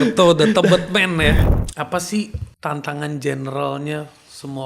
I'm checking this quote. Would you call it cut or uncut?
cut